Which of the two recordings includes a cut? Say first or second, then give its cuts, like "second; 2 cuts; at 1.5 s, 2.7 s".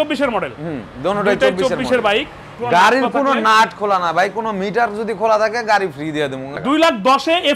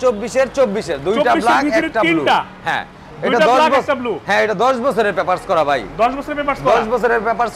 first; 2 cuts; at 2.6 s, 6.5 s